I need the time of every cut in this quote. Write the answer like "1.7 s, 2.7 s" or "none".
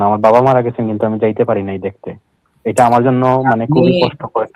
none